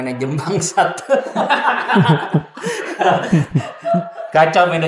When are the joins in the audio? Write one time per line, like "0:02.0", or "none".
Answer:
none